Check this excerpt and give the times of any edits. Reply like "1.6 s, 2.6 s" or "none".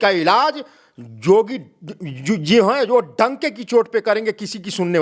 none

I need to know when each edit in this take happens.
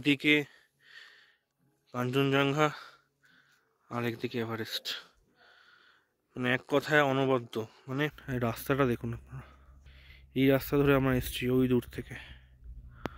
8.2 s

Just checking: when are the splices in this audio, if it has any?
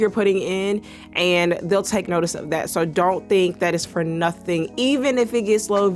none

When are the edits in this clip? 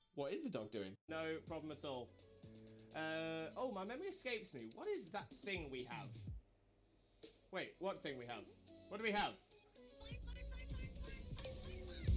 none

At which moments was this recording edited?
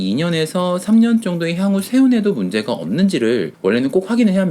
3.5 s

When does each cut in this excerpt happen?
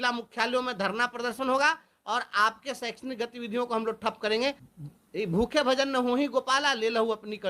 4.7 s

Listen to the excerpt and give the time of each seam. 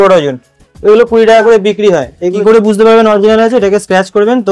2.4 s

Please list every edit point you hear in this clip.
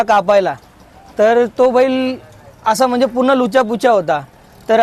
none

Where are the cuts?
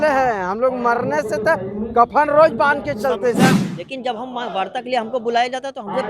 3.6 s

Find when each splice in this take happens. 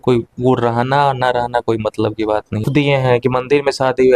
2.7 s

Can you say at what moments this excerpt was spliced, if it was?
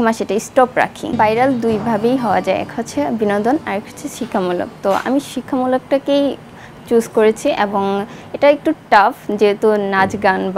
1.0 s

